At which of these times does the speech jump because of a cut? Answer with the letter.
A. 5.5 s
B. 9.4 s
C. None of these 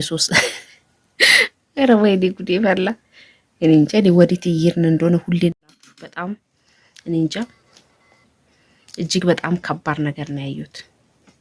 A